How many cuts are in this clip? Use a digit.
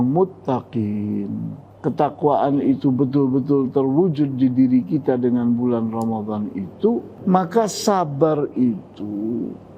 2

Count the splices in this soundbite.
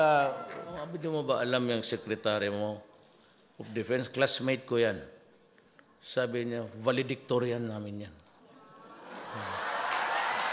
1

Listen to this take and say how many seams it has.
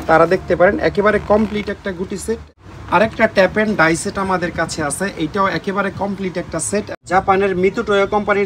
2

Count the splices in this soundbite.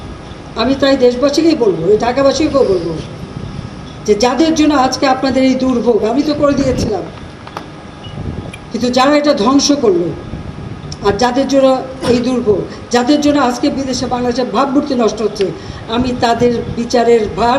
0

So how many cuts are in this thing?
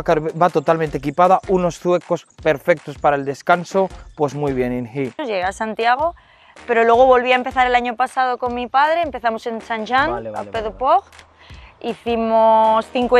1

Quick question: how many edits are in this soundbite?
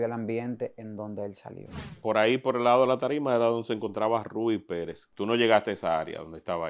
2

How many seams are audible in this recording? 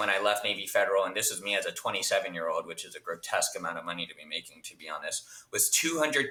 0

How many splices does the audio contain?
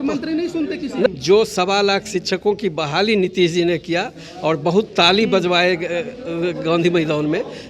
1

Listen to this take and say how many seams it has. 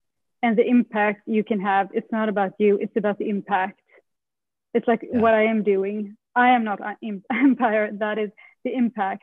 0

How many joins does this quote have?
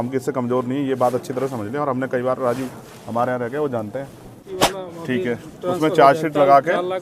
1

